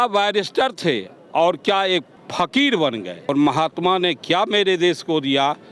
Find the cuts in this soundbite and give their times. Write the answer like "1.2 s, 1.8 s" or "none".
2.2 s, 3.3 s